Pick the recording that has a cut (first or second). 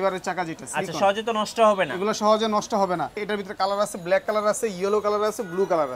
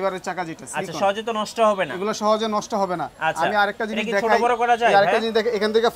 first